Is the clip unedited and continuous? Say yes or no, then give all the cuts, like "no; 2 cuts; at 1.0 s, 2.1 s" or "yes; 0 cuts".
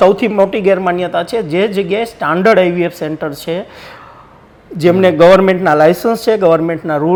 yes; 0 cuts